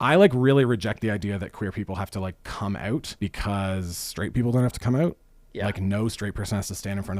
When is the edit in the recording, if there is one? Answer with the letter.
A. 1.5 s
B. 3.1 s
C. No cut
B